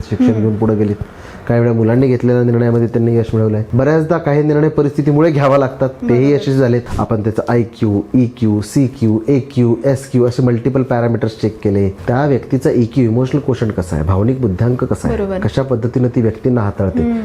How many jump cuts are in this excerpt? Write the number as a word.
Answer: three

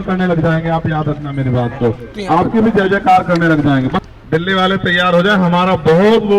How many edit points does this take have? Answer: one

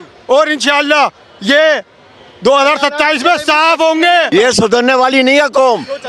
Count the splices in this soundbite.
one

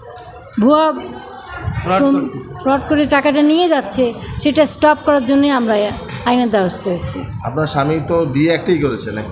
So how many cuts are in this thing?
zero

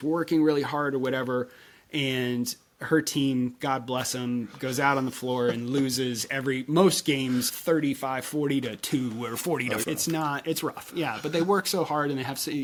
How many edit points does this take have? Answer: zero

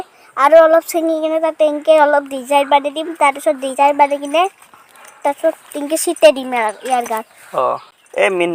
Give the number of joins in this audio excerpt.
zero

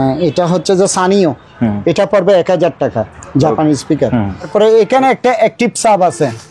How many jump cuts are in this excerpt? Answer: one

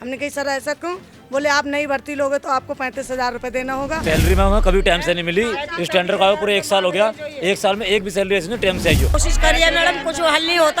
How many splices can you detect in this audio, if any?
two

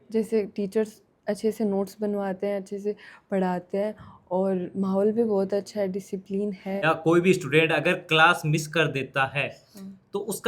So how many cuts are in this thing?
one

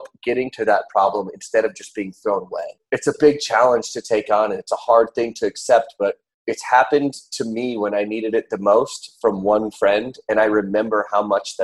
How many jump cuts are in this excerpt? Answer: two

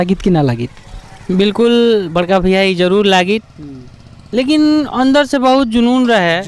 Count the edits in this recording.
zero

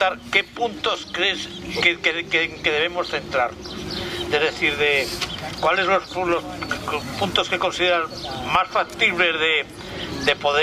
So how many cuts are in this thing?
zero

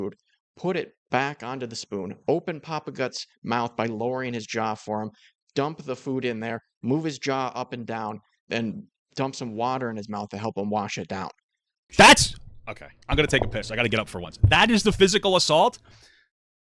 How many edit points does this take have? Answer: one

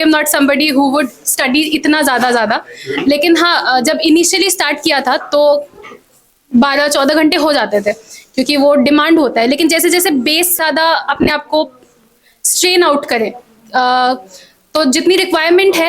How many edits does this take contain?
one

